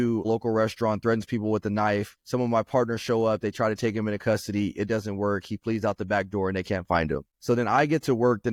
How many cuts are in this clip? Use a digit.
0